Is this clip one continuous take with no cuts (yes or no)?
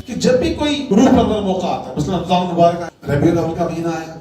no